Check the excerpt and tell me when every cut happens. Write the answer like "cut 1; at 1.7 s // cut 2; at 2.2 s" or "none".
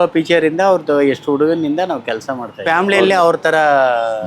cut 1; at 2.5 s